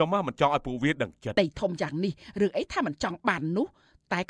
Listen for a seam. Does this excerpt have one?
yes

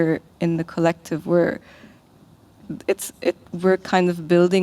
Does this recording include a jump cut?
no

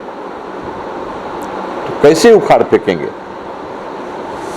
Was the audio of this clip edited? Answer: no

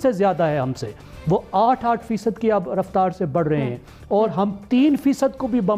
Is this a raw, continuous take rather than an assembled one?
yes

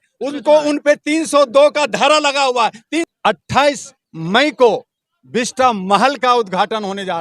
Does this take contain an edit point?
yes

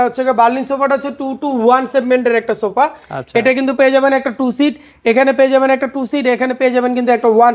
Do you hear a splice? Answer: no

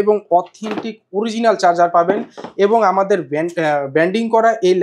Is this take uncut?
yes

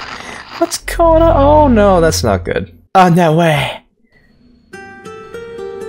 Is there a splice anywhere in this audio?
yes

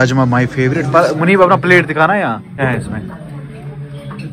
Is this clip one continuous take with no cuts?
no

